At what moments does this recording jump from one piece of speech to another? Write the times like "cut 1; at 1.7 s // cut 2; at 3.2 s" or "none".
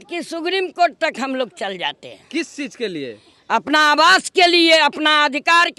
none